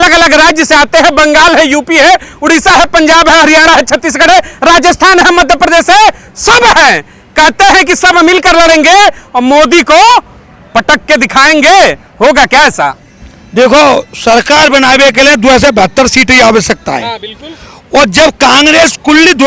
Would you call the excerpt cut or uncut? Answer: uncut